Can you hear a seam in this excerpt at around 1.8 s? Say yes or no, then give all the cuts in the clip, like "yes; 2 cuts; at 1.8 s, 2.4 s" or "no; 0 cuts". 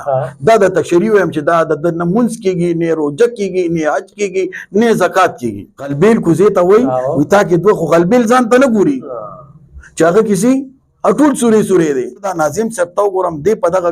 no; 2 cuts; at 5.9 s, 12.3 s